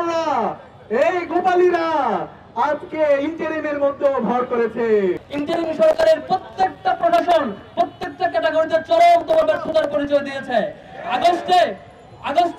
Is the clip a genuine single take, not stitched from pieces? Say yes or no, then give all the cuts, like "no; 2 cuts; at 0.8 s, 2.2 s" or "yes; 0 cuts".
no; 1 cut; at 5.2 s